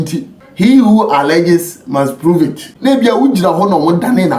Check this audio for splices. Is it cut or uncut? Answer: cut